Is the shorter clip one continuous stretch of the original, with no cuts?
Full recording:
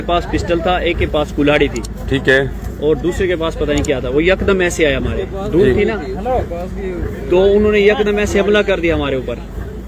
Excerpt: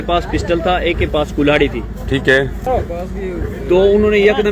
no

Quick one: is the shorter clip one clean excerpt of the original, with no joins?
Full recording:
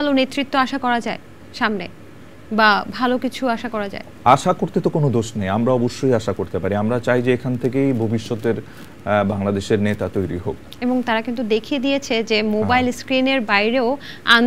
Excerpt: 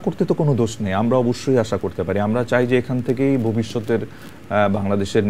yes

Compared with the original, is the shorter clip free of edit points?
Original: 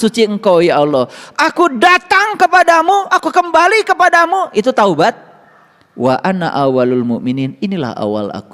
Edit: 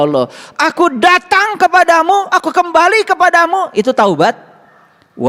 yes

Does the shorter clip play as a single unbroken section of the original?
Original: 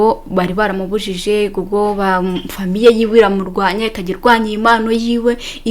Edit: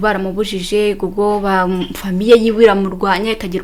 yes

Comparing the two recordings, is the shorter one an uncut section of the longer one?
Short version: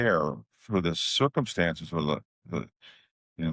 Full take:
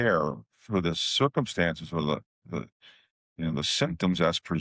yes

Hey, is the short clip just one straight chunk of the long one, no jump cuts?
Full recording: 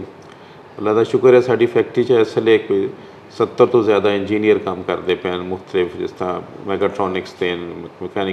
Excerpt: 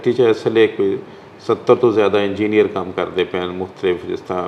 yes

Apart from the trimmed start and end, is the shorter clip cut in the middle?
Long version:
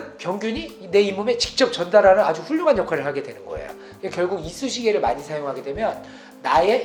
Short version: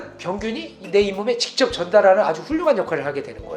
no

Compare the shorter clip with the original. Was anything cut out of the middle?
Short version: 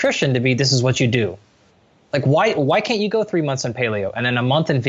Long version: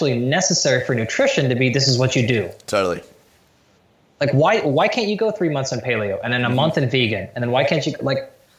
yes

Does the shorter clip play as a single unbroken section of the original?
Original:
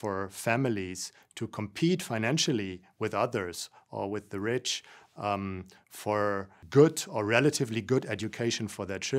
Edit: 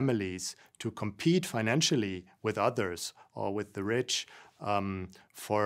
yes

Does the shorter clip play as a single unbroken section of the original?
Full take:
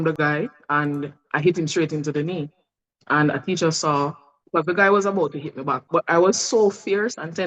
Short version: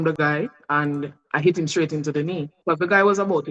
no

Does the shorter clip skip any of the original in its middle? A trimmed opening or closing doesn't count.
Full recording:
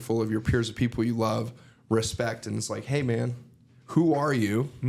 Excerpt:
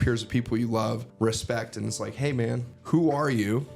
yes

